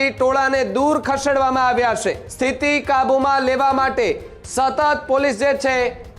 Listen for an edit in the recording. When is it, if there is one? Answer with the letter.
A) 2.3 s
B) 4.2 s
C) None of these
A